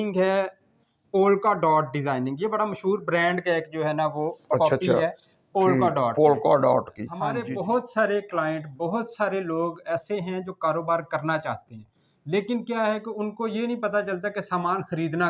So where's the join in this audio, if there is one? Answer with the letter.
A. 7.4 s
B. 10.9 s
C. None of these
A